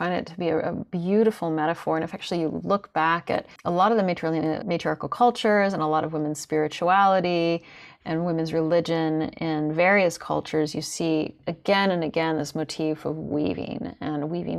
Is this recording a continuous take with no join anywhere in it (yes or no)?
no